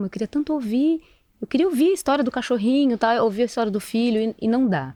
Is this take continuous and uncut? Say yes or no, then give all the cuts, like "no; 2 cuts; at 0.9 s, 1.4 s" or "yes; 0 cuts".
yes; 0 cuts